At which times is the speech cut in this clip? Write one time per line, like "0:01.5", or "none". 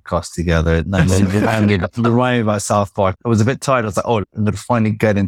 0:03.2
0:04.3